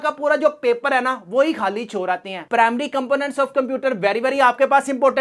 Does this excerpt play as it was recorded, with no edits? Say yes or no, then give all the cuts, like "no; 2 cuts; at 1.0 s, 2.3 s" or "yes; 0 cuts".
no; 1 cut; at 2.4 s